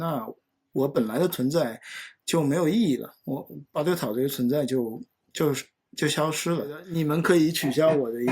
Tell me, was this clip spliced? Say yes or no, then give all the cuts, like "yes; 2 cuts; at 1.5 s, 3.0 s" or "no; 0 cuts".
yes; 1 cut; at 6.8 s